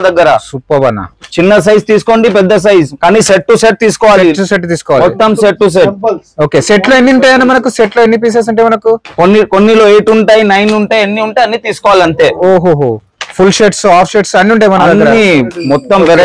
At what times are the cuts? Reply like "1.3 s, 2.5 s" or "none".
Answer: none